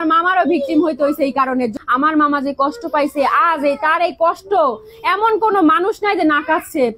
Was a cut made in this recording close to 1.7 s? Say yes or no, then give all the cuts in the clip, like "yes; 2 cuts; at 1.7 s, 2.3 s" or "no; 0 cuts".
yes; 1 cut; at 1.7 s